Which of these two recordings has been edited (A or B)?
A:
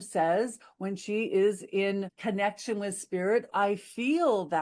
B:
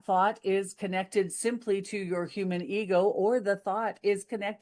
A